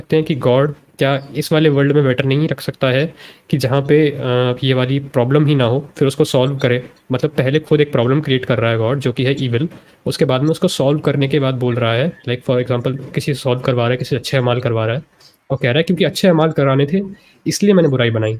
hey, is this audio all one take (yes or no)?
yes